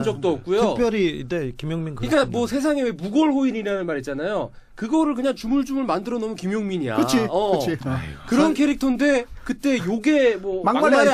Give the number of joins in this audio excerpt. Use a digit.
1